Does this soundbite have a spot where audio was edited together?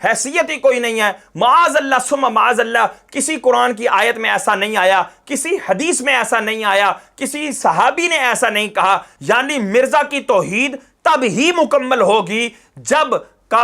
yes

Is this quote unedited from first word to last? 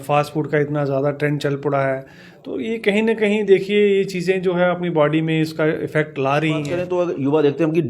no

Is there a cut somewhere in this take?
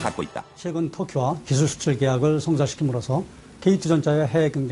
yes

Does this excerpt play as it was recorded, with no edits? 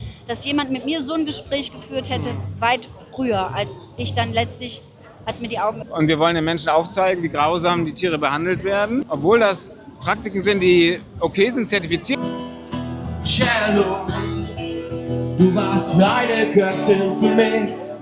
no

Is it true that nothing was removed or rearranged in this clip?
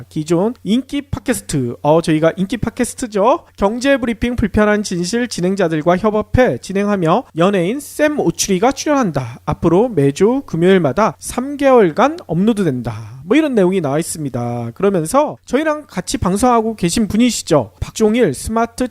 no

